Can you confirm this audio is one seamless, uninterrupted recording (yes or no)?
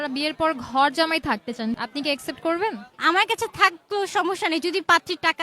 no